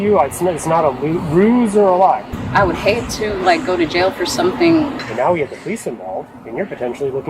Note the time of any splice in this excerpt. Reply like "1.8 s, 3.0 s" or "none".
2.3 s, 5.0 s